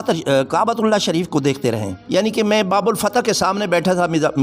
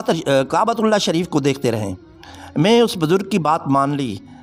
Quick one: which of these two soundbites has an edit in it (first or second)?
first